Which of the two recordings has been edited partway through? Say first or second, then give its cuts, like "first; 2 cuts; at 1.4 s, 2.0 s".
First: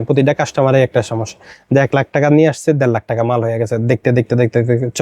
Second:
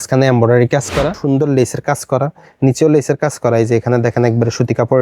second; 1 cut; at 1.2 s